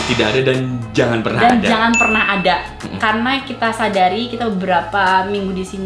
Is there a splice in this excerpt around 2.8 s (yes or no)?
no